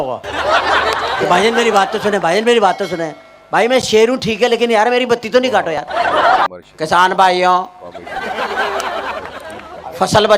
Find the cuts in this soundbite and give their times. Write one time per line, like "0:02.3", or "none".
0:06.5